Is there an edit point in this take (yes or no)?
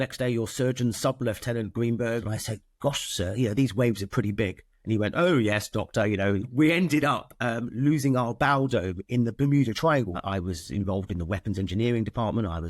yes